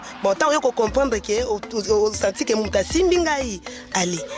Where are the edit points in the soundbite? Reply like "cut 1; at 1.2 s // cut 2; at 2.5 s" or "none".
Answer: none